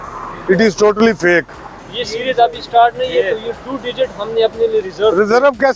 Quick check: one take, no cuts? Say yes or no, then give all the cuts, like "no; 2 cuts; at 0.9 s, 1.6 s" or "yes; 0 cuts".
no; 1 cut; at 1.8 s